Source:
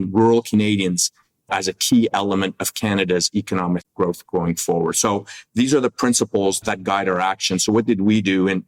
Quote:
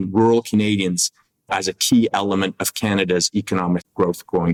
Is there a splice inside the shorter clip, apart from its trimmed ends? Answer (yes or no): no